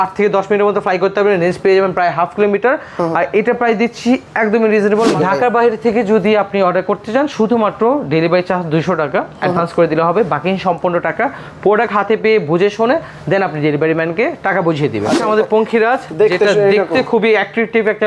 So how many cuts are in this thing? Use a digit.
2